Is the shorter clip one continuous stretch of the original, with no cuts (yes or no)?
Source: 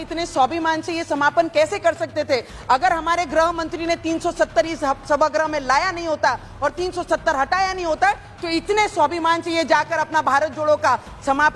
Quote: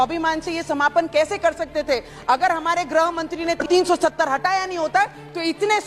no